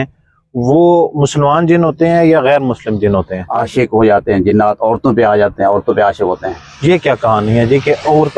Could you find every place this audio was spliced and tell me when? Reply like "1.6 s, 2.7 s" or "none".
3.4 s